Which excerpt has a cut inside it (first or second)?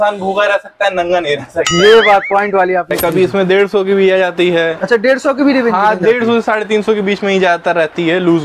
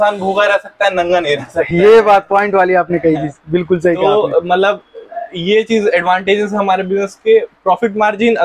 first